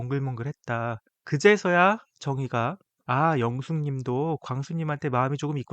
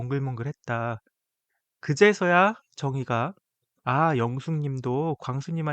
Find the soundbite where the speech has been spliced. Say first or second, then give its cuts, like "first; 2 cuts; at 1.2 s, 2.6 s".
first; 2 cuts; at 1.1 s, 2.9 s